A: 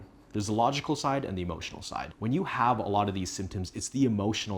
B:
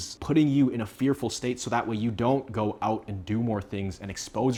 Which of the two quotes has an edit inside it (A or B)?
A